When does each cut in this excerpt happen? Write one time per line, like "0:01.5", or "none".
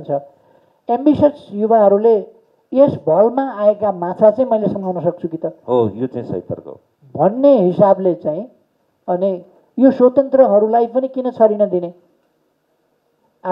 none